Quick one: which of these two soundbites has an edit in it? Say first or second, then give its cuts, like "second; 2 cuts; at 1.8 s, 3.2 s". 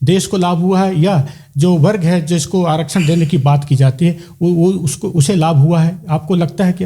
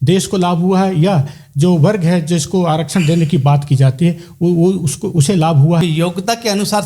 second; 1 cut; at 5.8 s